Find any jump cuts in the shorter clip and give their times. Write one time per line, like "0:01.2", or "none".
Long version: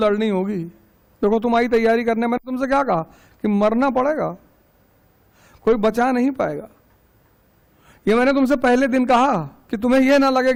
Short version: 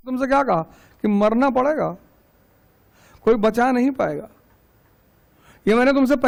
none